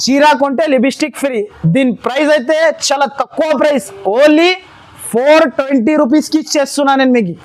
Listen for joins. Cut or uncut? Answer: uncut